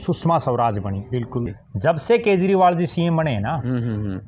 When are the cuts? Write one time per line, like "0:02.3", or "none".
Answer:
0:01.5